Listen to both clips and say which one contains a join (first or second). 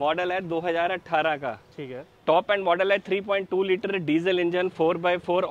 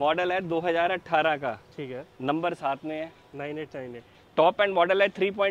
first